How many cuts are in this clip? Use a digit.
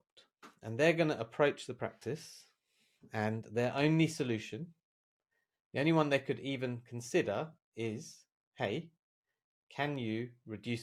0